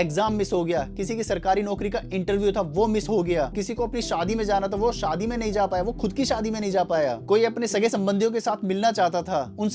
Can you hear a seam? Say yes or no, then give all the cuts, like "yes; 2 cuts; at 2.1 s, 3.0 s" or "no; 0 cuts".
no; 0 cuts